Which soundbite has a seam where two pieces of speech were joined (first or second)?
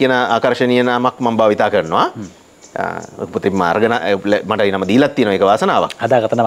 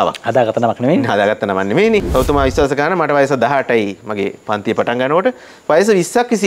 second